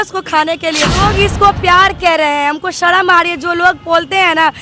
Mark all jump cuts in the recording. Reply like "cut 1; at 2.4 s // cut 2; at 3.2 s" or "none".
cut 1; at 1.0 s